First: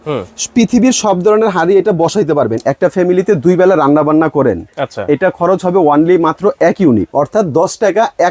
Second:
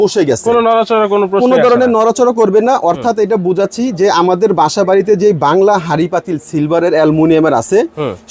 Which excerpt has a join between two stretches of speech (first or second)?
first